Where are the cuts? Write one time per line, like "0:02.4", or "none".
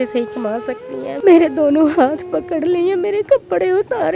0:01.1